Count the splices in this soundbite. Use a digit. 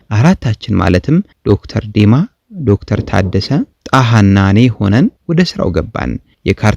3